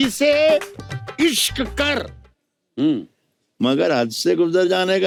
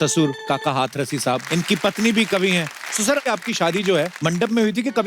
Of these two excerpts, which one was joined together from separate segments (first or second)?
second